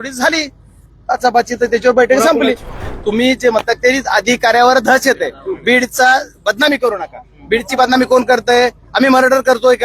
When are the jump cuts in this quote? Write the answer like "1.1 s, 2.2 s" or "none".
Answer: 2.8 s